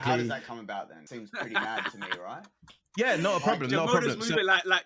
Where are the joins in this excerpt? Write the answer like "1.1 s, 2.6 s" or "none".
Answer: 1.1 s